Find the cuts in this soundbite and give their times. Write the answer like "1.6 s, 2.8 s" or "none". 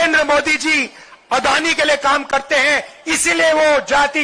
none